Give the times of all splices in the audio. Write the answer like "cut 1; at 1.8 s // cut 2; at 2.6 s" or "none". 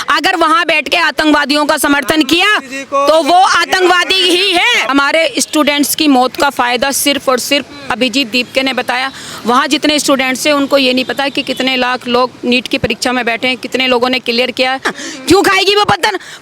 cut 1; at 4.9 s // cut 2; at 14.9 s